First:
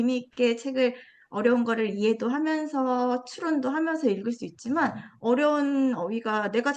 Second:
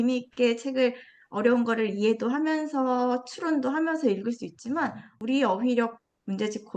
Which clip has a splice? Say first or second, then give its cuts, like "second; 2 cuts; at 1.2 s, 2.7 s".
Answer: second; 1 cut; at 5.1 s